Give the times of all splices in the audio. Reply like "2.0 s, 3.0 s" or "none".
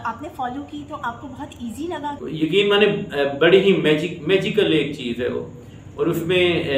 2.2 s